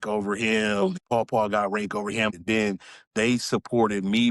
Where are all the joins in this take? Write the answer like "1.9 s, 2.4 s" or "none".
1.0 s, 2.4 s